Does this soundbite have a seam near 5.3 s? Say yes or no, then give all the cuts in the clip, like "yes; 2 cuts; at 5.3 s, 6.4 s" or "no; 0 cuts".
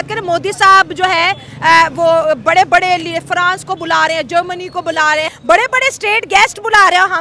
yes; 1 cut; at 5.3 s